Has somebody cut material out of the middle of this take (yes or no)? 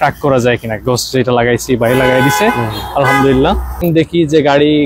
yes